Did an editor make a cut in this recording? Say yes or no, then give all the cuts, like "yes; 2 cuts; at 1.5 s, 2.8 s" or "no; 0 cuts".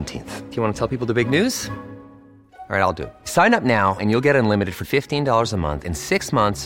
no; 0 cuts